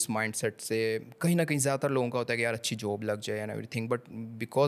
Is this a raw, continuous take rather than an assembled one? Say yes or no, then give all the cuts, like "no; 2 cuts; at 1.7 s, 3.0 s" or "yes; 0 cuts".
yes; 0 cuts